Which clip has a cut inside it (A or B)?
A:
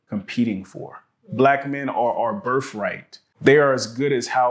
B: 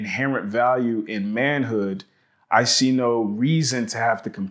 A